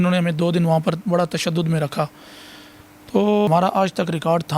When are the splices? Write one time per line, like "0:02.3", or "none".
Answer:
0:03.5